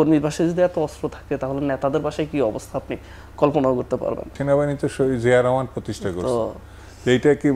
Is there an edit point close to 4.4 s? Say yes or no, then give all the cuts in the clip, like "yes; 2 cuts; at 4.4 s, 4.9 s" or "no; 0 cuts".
yes; 1 cut; at 4.4 s